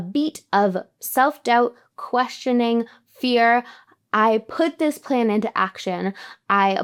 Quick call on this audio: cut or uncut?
uncut